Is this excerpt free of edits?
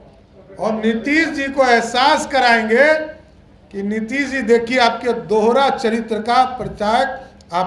yes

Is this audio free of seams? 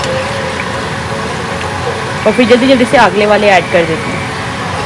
yes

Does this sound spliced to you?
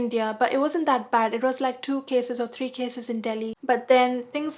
yes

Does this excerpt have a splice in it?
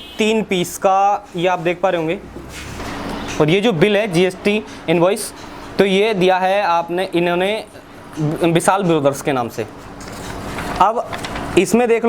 yes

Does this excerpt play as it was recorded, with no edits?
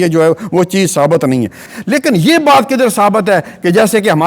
no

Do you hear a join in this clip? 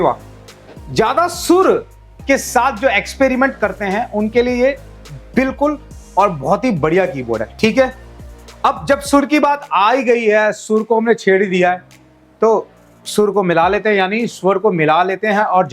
no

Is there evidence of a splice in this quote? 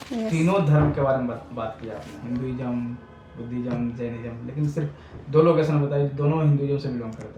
no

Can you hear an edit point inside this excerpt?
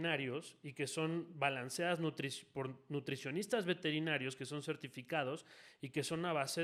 no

